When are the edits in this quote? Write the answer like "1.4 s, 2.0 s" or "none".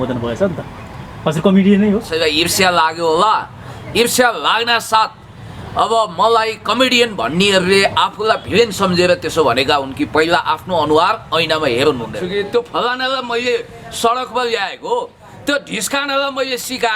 2.1 s, 12.2 s